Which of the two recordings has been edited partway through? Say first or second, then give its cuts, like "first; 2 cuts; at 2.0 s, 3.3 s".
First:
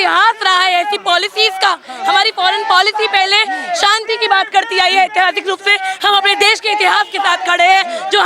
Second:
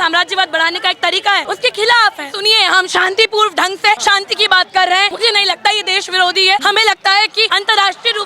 second; 6 cuts; at 1.4 s, 2.3 s, 4.0 s, 5.1 s, 6.6 s, 7.5 s